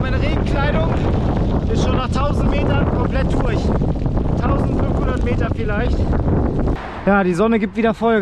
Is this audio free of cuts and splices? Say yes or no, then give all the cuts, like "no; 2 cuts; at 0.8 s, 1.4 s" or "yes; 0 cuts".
no; 1 cut; at 6.8 s